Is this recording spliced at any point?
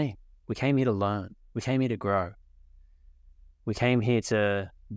no; 0 cuts

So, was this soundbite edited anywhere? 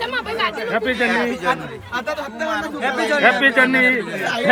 no; 0 cuts

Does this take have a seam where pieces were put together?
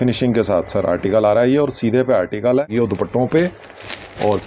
yes; 1 cut; at 2.7 s

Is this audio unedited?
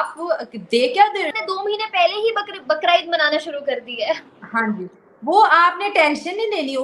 no; 1 cut; at 1.3 s

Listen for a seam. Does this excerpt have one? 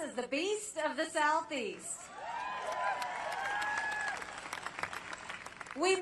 yes; 1 cut; at 3.5 s

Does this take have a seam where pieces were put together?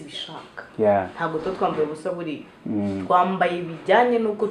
no; 0 cuts

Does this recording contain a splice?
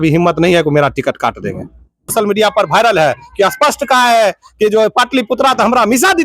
yes; 1 cut; at 2.1 s

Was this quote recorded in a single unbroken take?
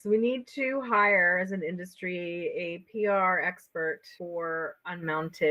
yes; 0 cuts

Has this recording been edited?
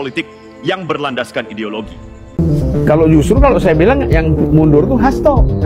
yes; 1 cut; at 2.4 s

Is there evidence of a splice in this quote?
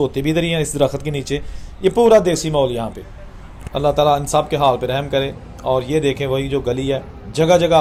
no; 0 cuts

